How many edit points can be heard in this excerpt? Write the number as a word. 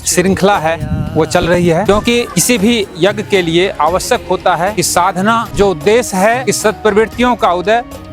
two